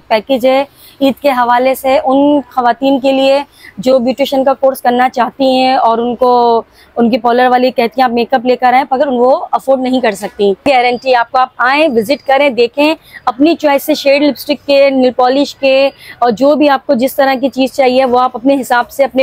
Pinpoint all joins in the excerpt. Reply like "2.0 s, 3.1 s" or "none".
10.6 s